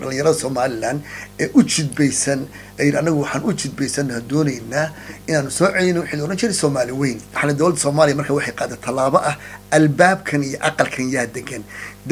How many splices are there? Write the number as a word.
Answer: one